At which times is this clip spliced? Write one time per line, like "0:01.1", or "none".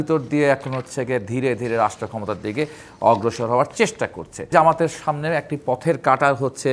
0:04.5